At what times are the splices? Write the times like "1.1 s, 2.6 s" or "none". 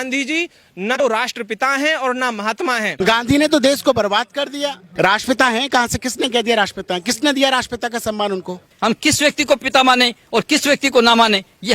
1.0 s, 3.0 s, 4.8 s